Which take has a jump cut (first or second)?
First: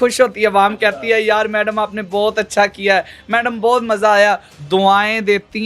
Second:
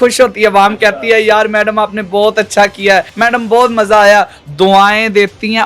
second